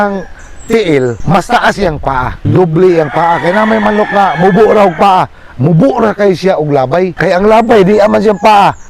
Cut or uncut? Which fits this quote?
cut